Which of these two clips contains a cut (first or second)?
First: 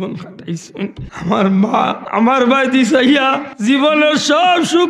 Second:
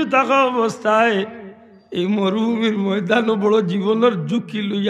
first